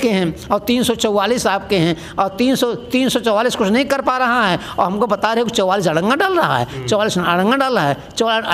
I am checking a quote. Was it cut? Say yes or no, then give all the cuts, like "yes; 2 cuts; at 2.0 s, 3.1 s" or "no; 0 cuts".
no; 0 cuts